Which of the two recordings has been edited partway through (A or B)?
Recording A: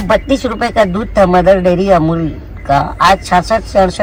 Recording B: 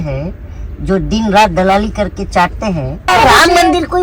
B